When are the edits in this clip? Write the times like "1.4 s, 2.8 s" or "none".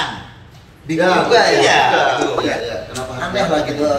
2.5 s